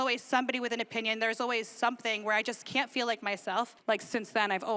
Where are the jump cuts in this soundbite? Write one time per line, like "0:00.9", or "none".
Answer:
0:03.8